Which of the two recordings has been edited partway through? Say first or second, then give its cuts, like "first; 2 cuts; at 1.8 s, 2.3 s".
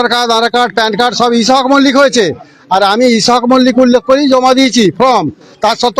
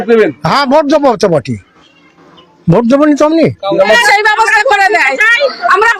second; 1 cut; at 4.0 s